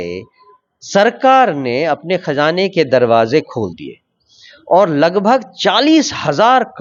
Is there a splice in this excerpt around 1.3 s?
no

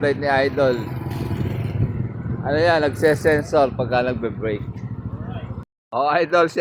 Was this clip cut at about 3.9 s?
no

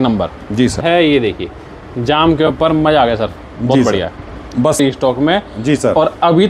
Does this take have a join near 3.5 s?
no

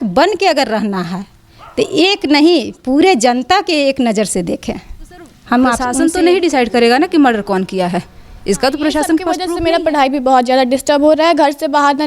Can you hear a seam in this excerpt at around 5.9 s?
yes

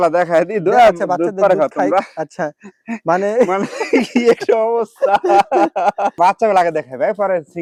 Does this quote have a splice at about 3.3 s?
no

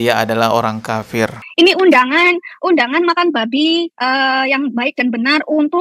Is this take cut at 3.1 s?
no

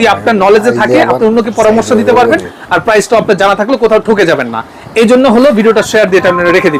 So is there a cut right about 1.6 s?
no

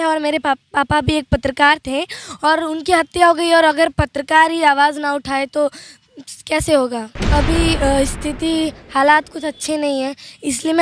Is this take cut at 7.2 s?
yes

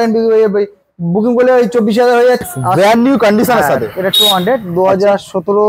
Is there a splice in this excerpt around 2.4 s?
yes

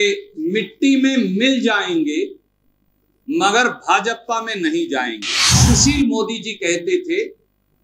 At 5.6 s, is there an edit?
yes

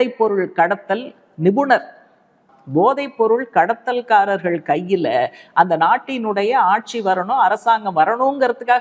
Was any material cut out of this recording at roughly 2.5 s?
yes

